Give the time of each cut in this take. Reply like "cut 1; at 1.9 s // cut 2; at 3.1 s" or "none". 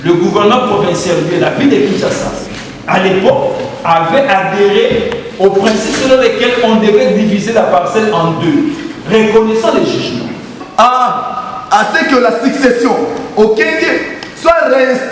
cut 1; at 10.6 s